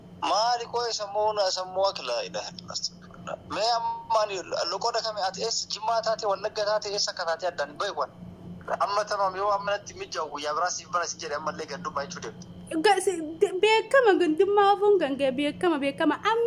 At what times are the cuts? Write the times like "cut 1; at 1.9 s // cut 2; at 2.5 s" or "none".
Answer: cut 1; at 8.5 s